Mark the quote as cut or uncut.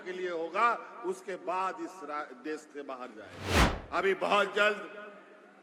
cut